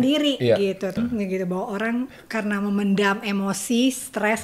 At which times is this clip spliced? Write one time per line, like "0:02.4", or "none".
0:00.9